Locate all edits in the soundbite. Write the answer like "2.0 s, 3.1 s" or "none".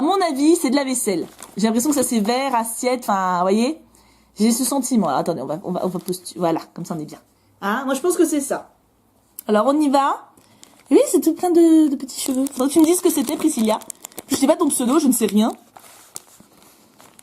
1.2 s